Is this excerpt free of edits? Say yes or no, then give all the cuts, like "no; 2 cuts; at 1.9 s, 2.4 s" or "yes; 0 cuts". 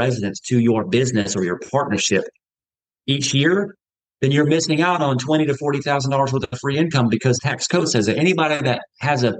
no; 1 cut; at 7.5 s